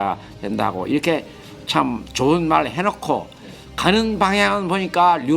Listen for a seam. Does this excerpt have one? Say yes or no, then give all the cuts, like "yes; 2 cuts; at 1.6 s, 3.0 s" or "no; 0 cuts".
no; 0 cuts